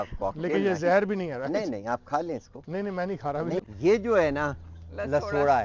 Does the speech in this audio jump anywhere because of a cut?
yes; 1 cut; at 3.7 s

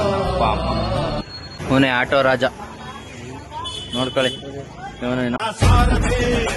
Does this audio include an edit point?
no; 0 cuts

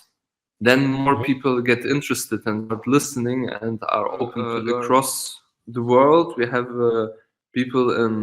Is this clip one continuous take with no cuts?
no; 1 cut; at 4.5 s

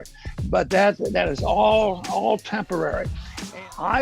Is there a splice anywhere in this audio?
yes; 1 cut; at 3.1 s

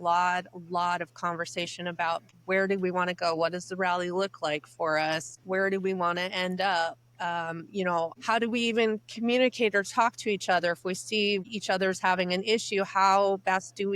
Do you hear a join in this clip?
yes; 4 cuts; at 2.3 s, 5.3 s, 8.2 s, 11.4 s

